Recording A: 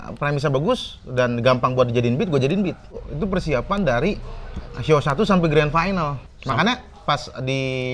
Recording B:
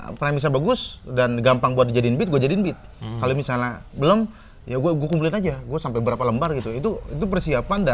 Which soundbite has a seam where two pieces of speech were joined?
A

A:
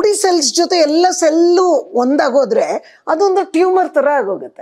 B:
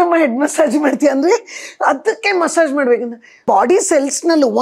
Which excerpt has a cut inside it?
B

